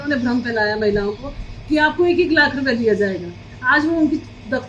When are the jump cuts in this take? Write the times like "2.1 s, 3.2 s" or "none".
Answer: none

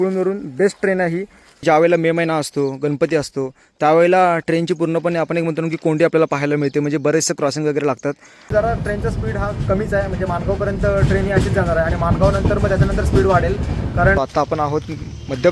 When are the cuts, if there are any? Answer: 1.6 s, 8.5 s, 14.2 s

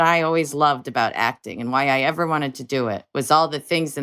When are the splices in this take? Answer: none

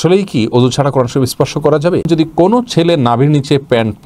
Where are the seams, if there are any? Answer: 2.1 s

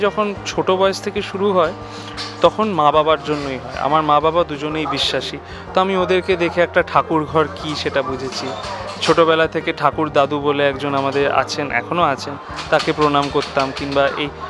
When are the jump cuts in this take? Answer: none

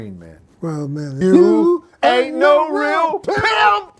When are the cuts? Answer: 1.2 s

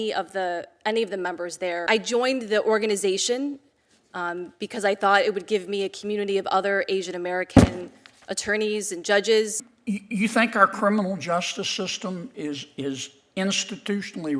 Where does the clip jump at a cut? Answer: 1.8 s, 9.7 s

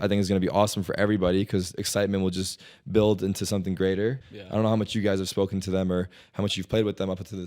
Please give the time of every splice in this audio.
4.2 s

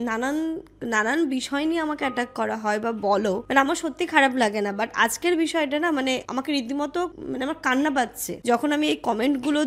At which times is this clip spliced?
none

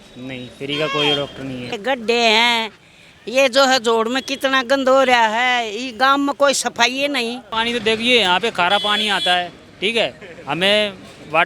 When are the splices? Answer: 1.8 s, 7.5 s

